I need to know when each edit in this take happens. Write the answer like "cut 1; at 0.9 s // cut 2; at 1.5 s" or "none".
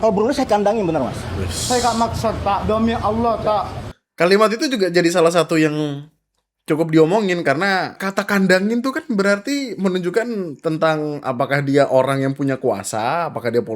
cut 1; at 7.9 s

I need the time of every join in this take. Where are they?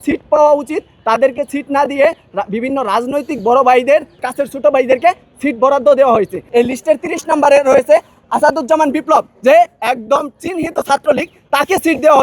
cut 1; at 4.3 s // cut 2; at 6.4 s // cut 3; at 8.2 s

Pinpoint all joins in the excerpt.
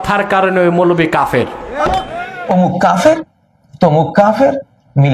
cut 1; at 2.2 s

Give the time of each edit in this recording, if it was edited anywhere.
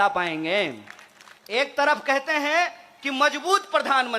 cut 1; at 1.6 s

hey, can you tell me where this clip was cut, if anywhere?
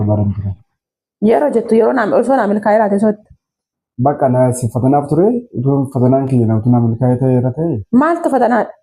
none

